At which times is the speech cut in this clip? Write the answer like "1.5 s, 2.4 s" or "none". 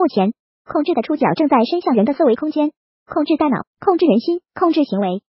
none

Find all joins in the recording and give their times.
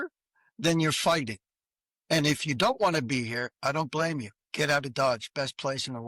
none

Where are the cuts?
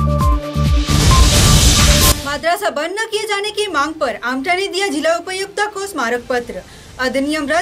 2.1 s

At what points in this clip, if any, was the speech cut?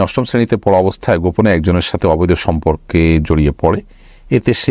none

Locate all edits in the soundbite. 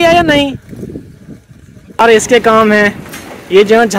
2.0 s

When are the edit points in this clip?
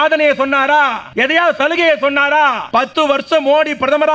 1.0 s, 2.8 s

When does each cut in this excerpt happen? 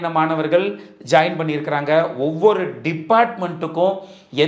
none

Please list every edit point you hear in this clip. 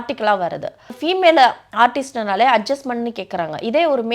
1.0 s

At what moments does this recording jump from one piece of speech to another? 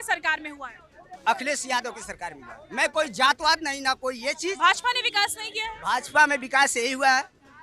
none

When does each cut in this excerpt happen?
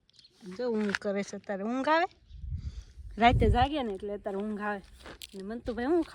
none

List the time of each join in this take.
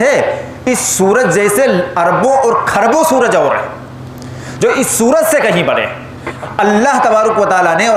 6.3 s

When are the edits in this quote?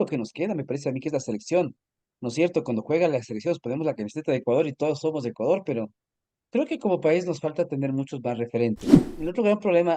8.9 s

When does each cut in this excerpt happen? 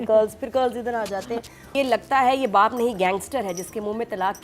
1.7 s

